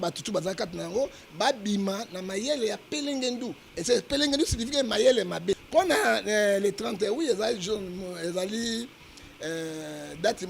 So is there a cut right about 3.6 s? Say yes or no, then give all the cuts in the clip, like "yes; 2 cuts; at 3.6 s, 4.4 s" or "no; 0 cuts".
no; 1 cut; at 5.6 s